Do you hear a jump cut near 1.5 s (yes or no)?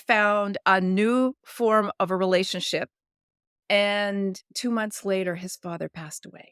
no